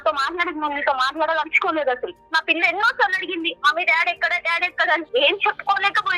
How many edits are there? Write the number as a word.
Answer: one